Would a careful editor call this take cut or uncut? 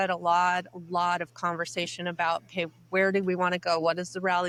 uncut